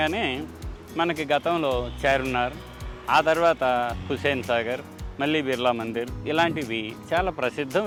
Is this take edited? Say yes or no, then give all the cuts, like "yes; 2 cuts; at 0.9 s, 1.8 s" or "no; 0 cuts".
no; 0 cuts